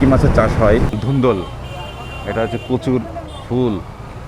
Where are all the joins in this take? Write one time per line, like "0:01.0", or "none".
0:00.9